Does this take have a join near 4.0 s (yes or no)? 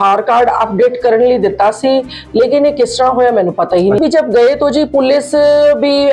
yes